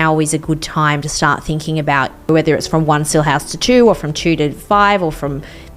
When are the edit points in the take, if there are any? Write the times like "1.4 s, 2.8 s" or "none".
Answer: 2.3 s